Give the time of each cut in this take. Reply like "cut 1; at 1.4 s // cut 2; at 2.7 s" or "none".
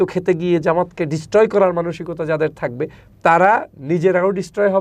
none